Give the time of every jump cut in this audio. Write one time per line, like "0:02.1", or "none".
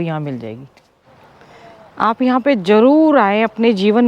0:01.0